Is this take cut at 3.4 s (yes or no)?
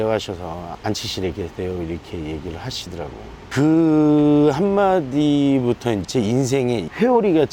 yes